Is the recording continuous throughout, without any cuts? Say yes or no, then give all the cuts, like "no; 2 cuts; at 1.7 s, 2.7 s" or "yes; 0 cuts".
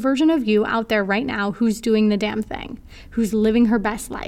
yes; 0 cuts